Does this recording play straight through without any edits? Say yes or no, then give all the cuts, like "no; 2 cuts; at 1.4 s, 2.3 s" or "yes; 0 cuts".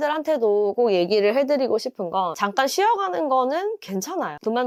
yes; 0 cuts